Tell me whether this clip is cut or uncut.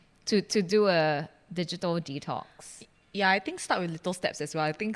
uncut